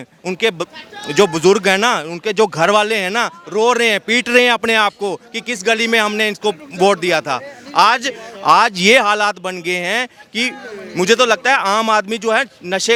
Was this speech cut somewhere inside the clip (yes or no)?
no